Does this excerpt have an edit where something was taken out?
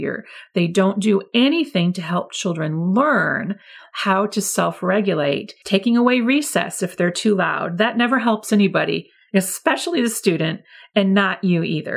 yes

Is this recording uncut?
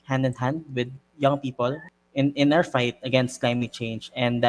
no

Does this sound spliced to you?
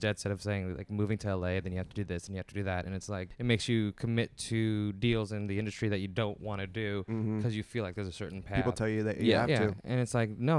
yes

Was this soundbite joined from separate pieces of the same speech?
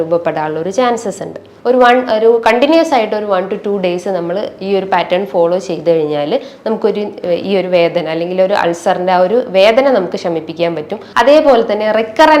yes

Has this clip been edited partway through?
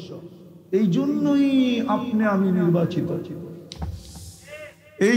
no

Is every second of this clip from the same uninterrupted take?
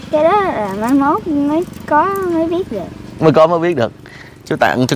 yes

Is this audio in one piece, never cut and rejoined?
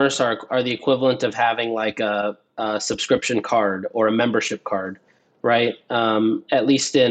yes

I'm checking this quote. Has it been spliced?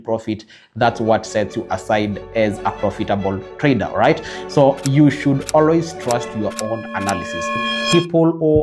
yes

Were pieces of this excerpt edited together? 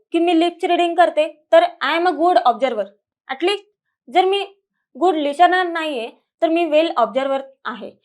no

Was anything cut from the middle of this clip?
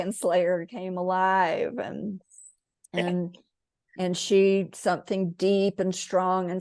no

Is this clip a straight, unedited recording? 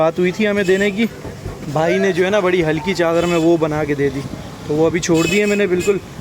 yes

